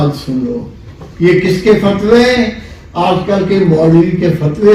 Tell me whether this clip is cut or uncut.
uncut